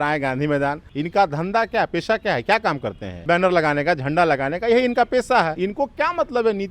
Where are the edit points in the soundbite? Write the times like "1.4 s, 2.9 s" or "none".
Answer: 0.9 s, 3.2 s, 5.5 s